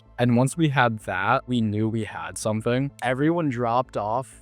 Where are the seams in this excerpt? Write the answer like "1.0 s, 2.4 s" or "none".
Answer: 1.5 s, 2.9 s